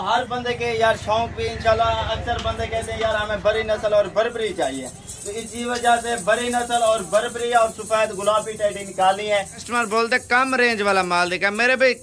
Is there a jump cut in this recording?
yes; 1 cut; at 9.7 s

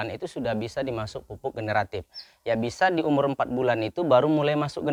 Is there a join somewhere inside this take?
no; 0 cuts

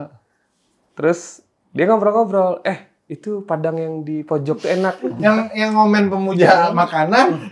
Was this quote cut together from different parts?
yes; 1 cut; at 5.1 s

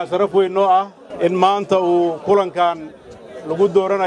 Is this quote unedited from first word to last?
no; 1 cut; at 1.0 s

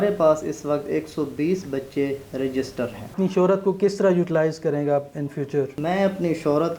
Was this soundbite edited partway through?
yes; 2 cuts; at 3.0 s, 5.7 s

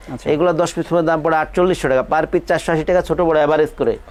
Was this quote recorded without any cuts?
yes; 0 cuts

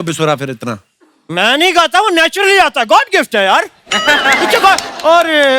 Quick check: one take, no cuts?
yes; 0 cuts

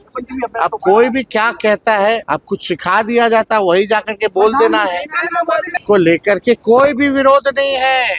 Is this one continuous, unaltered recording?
no; 2 cuts; at 2.2 s, 5.7 s

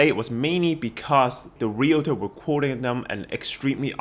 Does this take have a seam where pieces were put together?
yes; 1 cut; at 1.5 s

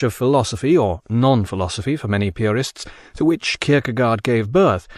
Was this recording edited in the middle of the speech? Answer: yes; 1 cut; at 1.7 s

